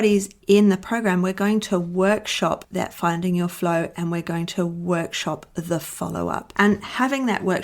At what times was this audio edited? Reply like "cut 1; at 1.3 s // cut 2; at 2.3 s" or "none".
cut 1; at 2.6 s // cut 2; at 6.5 s